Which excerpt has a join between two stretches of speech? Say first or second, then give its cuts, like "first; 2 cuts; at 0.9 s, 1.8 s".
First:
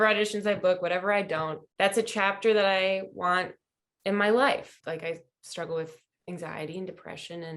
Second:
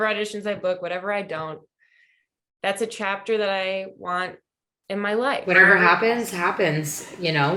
first; 3 cuts; at 1.6 s, 4.6 s, 6.1 s